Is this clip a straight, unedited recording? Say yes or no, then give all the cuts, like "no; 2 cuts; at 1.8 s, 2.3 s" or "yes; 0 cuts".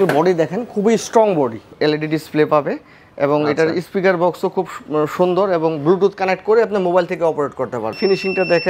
no; 2 cuts; at 1.7 s, 8.0 s